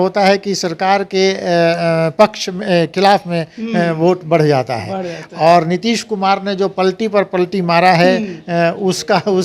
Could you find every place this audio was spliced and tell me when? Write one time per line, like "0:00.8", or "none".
none